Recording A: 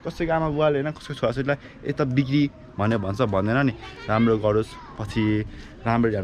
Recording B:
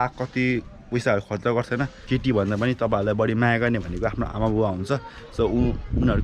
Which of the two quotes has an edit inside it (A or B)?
B